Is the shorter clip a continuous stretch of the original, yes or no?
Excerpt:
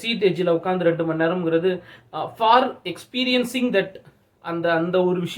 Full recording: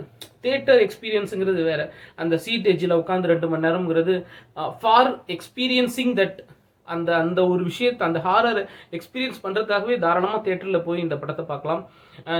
yes